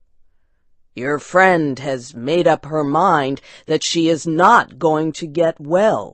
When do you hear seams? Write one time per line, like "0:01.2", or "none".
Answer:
none